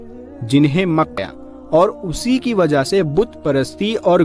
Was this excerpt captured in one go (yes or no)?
no